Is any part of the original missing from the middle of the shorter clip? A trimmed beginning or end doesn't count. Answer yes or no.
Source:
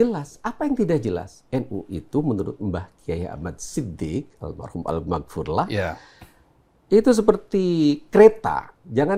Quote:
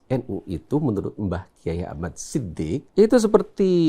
yes